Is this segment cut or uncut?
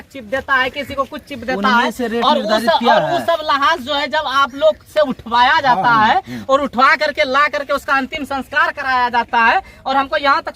uncut